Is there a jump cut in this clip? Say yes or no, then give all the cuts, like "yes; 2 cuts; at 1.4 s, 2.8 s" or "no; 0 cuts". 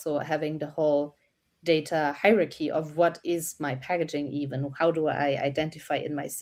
no; 0 cuts